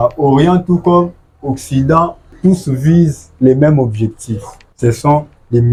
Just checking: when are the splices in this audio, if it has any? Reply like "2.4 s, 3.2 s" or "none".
none